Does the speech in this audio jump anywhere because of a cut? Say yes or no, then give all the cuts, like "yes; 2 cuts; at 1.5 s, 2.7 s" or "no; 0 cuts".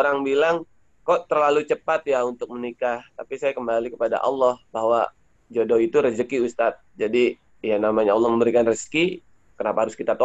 no; 0 cuts